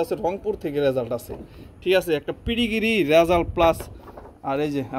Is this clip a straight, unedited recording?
yes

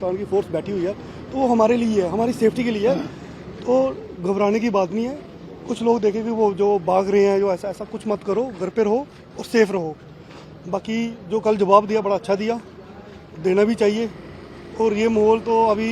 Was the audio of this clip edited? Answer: no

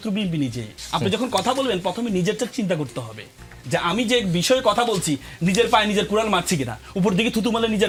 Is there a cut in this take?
no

